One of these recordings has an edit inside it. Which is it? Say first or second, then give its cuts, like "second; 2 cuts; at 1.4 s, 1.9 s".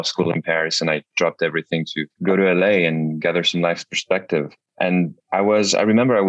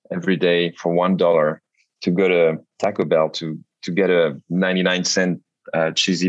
first; 2 cuts; at 2.1 s, 4.8 s